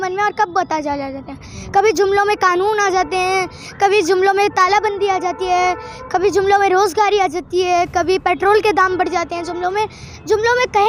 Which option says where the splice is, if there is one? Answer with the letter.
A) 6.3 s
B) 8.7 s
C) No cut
C